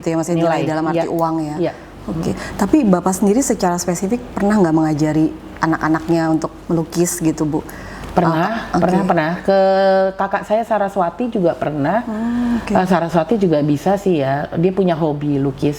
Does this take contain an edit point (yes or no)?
no